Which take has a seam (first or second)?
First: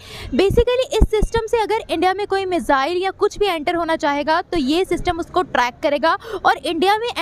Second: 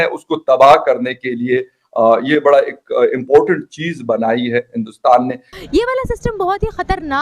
second